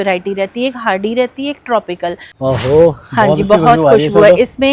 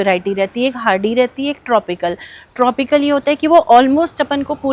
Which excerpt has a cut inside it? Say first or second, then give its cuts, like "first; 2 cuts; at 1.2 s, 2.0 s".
first; 1 cut; at 2.3 s